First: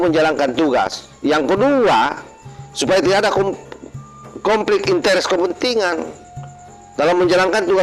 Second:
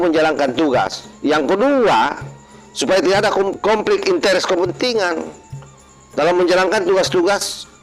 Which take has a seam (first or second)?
second